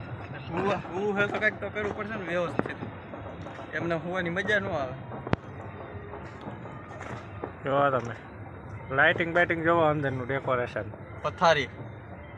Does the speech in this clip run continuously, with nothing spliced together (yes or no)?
yes